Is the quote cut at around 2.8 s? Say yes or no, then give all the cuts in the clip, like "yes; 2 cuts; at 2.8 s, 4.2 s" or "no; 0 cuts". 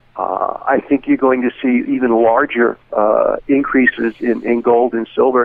no; 0 cuts